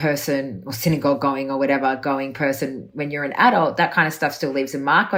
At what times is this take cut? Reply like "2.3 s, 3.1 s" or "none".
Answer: none